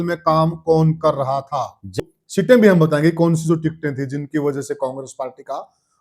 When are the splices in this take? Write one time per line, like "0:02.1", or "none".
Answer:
0:02.0